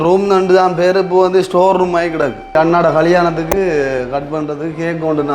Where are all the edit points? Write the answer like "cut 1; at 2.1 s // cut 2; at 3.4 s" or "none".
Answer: cut 1; at 2.6 s